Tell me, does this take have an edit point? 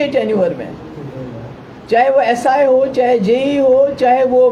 no; 0 cuts

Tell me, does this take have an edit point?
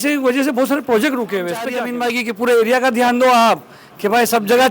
yes; 1 cut; at 1.9 s

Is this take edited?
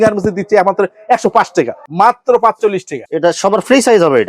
yes; 1 cut; at 1.9 s

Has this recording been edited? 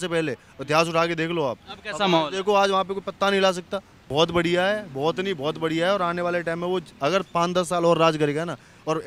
yes; 1 cut; at 4.1 s

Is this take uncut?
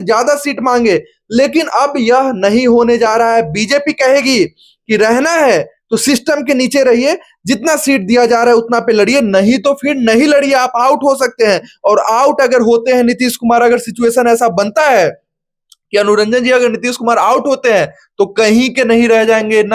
yes; 0 cuts

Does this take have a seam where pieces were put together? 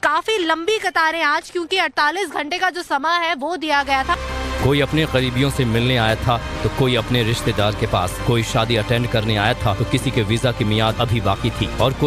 yes; 1 cut; at 9.5 s

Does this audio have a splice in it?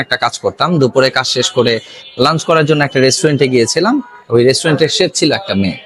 no; 0 cuts

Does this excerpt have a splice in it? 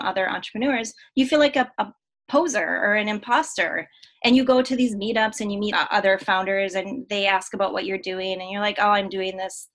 yes; 1 cut; at 5.7 s

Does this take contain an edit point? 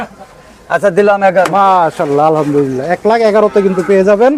no; 0 cuts

